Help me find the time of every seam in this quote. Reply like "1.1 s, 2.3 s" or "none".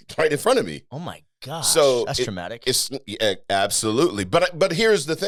none